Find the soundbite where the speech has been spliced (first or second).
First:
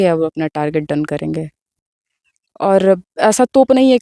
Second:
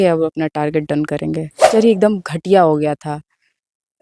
second